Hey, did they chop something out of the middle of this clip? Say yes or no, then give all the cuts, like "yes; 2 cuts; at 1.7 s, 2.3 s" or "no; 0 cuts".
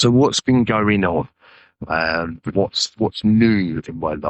no; 0 cuts